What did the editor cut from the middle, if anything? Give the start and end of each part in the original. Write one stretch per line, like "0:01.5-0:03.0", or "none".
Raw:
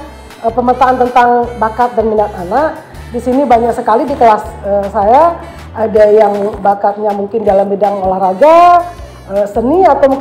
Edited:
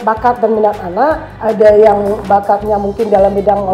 0:02.8-0:05.6